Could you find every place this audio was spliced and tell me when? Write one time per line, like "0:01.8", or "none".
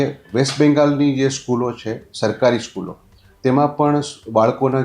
none